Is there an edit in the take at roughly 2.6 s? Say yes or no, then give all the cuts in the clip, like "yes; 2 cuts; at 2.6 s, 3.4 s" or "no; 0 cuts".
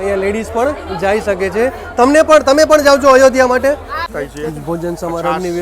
no; 1 cut; at 4.1 s